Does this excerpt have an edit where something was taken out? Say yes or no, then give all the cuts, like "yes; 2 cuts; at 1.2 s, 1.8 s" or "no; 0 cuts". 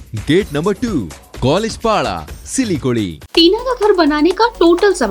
yes; 1 cut; at 3.2 s